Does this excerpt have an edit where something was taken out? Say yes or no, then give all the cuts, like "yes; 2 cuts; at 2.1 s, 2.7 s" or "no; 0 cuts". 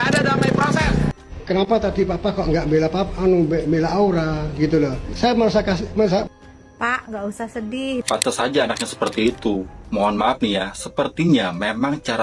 yes; 1 cut; at 8.0 s